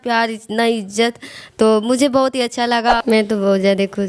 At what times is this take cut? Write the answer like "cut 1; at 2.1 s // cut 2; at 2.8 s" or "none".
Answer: cut 1; at 3.0 s